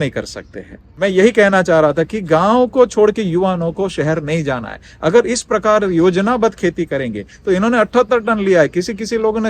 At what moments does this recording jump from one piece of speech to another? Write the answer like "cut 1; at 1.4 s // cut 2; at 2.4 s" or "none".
none